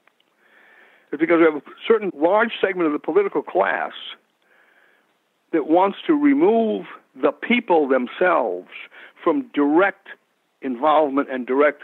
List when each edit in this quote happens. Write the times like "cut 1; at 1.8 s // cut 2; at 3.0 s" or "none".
none